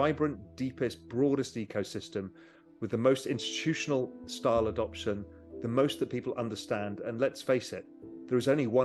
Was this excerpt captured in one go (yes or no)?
yes